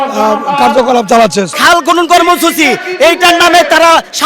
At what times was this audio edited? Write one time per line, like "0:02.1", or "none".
0:01.5